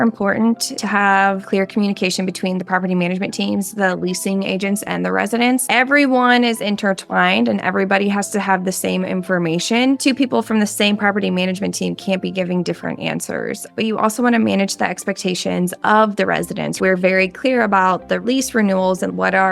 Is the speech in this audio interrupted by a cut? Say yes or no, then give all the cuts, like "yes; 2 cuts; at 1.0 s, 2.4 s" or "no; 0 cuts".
yes; 2 cuts; at 1.4 s, 16.8 s